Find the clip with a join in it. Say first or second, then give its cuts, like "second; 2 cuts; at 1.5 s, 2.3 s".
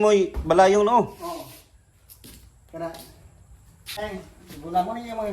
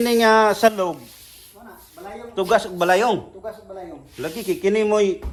first; 1 cut; at 4.0 s